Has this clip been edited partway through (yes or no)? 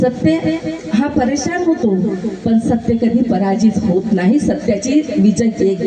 no